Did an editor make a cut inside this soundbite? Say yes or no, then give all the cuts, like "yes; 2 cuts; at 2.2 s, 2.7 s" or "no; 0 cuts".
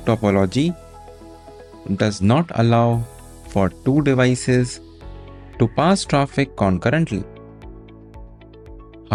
no; 0 cuts